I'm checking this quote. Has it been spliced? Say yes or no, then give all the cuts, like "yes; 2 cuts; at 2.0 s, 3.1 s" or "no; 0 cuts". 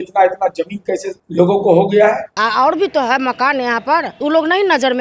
yes; 3 cuts; at 1.1 s, 2.3 s, 4.1 s